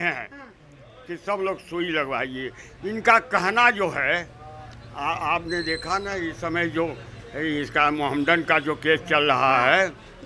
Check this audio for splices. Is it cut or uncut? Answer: uncut